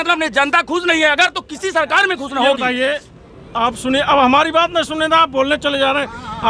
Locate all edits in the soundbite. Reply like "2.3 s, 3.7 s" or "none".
none